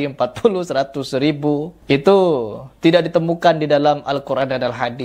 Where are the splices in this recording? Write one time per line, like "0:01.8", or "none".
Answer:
none